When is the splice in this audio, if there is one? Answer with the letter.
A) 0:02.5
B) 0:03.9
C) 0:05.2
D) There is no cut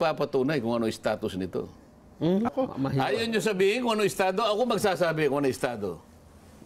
A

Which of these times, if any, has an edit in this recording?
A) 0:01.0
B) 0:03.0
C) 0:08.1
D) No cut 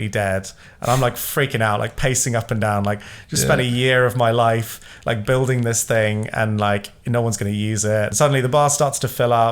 C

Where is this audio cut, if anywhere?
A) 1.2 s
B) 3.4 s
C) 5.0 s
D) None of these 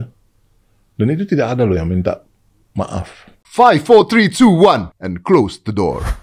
B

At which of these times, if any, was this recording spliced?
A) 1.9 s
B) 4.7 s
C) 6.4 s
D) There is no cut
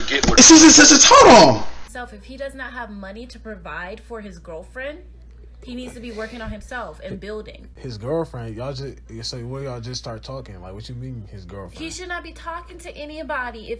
A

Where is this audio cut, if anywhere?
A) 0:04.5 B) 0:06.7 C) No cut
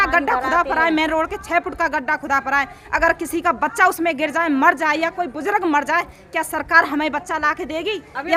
C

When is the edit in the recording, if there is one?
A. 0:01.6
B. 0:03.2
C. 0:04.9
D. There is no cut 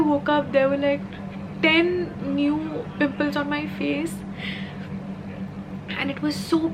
D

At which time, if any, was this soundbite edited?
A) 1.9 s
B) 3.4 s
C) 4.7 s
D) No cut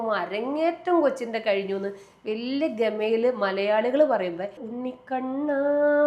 C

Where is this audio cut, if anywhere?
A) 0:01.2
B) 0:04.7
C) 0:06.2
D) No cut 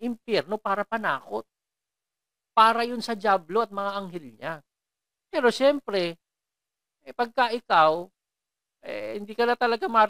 D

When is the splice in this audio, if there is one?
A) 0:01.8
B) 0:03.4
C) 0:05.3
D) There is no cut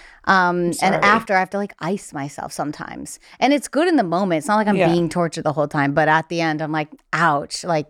D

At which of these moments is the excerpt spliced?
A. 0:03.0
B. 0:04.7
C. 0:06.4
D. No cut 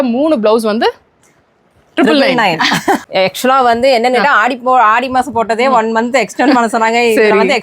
A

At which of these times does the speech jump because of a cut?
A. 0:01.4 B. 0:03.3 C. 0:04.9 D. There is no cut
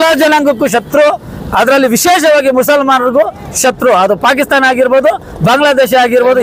D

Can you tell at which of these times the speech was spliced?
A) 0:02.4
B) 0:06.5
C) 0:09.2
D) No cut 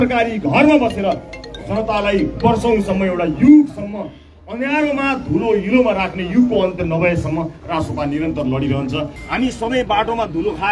C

